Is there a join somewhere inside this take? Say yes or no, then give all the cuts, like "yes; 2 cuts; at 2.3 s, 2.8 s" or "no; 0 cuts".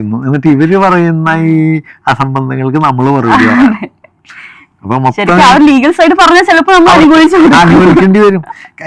no; 0 cuts